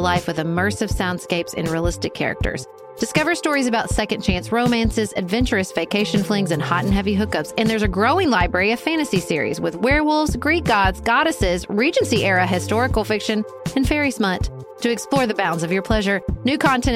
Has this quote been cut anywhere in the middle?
no; 0 cuts

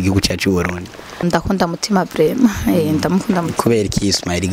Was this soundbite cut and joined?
yes; 1 cut; at 1.3 s

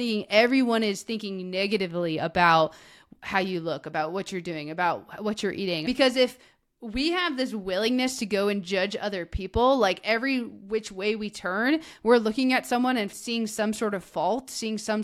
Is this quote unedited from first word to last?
no; 2 cuts; at 5.9 s, 13.1 s

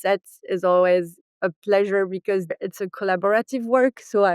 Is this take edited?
yes; 1 cut; at 2.5 s

